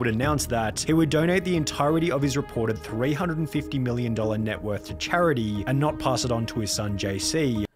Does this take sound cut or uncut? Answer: uncut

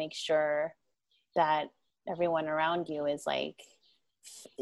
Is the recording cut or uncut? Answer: uncut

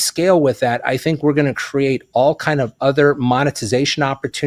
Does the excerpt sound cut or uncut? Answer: uncut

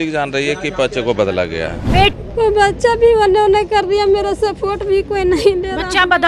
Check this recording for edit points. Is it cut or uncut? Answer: cut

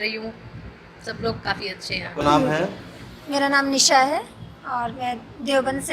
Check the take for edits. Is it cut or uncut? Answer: cut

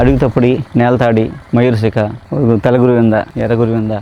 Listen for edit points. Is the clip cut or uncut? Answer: uncut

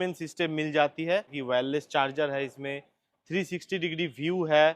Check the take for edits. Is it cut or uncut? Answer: cut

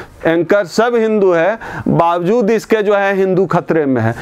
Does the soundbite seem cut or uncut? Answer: uncut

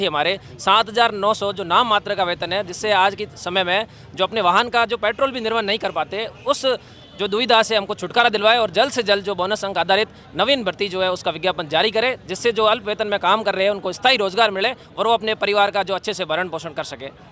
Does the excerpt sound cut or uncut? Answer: uncut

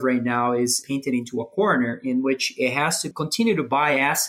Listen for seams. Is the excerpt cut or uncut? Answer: cut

